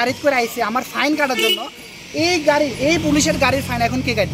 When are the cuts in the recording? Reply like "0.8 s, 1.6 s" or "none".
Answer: none